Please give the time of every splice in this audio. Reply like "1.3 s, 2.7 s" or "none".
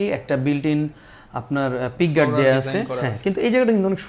none